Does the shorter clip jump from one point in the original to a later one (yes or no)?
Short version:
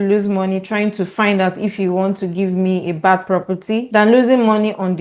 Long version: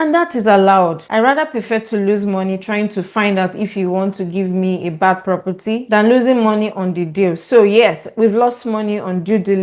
no